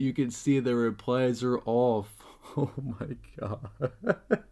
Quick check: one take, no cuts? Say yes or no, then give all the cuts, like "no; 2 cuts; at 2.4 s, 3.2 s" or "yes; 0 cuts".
yes; 0 cuts